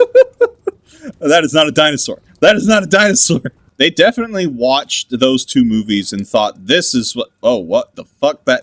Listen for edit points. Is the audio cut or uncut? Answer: cut